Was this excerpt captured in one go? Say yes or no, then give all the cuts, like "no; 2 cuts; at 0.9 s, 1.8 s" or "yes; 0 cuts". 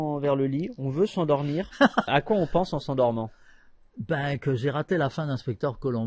no; 1 cut; at 2.1 s